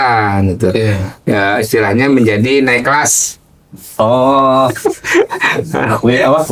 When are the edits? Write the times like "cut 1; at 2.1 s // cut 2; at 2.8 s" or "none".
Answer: none